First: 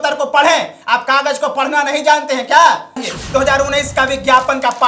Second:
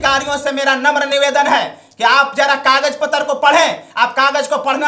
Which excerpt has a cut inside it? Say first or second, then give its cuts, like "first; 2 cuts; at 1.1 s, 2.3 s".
first; 1 cut; at 3.0 s